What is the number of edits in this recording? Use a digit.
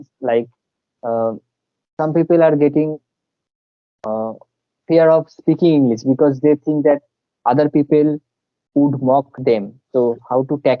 1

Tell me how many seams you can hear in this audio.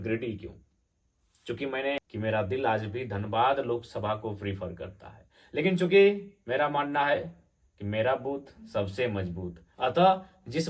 1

